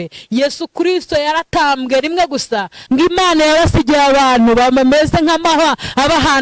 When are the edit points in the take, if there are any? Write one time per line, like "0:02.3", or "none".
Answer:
0:02.7